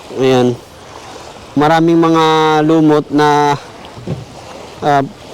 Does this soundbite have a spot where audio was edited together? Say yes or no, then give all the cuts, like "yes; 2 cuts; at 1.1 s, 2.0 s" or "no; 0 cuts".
yes; 1 cut; at 1.6 s